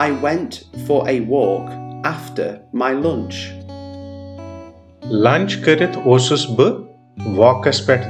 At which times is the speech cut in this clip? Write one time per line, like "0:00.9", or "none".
none